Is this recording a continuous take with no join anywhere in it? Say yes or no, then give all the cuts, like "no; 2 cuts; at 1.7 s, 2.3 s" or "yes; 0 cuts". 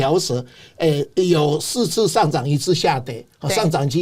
yes; 0 cuts